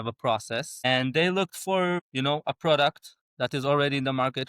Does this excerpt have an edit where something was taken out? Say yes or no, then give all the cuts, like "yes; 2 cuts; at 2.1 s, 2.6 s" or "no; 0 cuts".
yes; 2 cuts; at 0.9 s, 2.1 s